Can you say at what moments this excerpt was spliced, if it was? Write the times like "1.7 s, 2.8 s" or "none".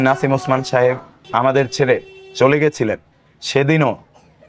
1.1 s